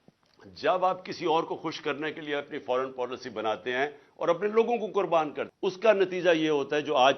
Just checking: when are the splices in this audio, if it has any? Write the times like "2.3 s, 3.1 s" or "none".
5.4 s